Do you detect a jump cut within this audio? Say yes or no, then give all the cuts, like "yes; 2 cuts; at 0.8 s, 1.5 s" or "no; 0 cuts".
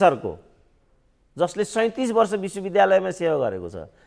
no; 0 cuts